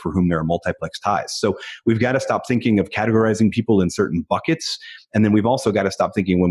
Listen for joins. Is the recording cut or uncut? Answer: uncut